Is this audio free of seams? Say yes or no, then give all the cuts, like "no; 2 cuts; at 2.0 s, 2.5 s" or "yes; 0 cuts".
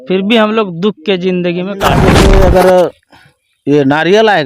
no; 1 cut; at 2.1 s